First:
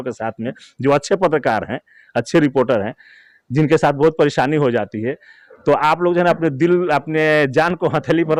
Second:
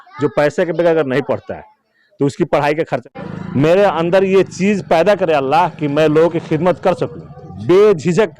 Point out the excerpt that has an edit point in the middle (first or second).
second